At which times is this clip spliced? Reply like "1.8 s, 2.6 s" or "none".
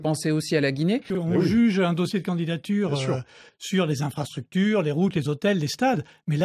1.1 s